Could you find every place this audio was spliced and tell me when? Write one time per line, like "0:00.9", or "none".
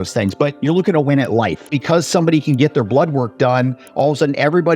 0:01.8